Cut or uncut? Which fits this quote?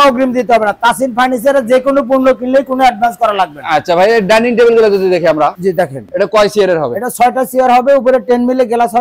uncut